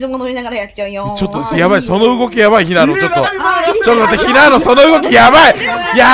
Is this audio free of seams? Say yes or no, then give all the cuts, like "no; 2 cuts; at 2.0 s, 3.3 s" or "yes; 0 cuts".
yes; 0 cuts